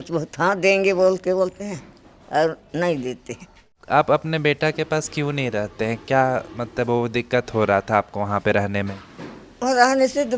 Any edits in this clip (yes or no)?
yes